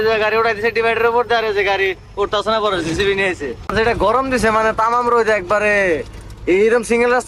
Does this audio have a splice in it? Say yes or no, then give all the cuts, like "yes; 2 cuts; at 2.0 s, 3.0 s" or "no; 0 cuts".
yes; 1 cut; at 3.6 s